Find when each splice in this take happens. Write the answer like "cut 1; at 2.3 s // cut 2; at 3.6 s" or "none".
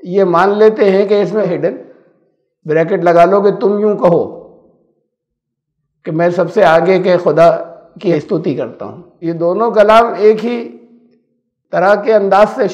cut 1; at 1.5 s // cut 2; at 8.1 s // cut 3; at 9.0 s